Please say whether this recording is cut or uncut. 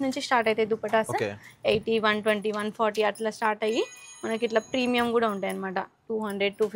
uncut